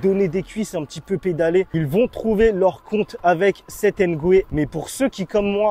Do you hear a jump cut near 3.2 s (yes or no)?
no